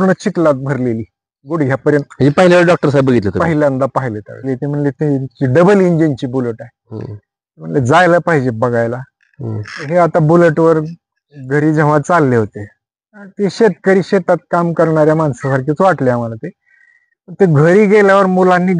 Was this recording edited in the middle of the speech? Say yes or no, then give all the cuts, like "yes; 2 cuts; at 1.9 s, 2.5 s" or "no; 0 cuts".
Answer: yes; 1 cut; at 4.5 s